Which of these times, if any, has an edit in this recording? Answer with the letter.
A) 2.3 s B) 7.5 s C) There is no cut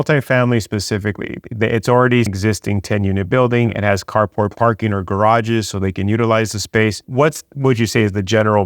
A